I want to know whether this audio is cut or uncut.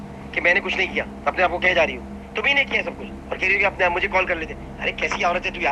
uncut